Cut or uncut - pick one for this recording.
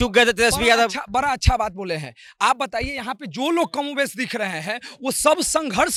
uncut